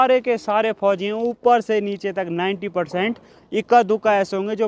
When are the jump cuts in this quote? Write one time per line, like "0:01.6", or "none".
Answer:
none